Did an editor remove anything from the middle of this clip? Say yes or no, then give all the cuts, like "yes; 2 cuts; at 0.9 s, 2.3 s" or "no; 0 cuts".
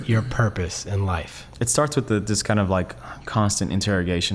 yes; 1 cut; at 1.4 s